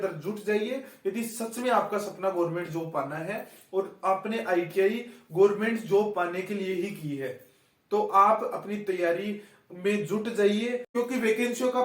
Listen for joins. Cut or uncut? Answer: cut